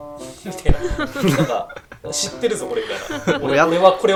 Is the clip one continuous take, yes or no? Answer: yes